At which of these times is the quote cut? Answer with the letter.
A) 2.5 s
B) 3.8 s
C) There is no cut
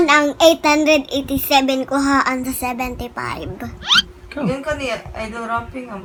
C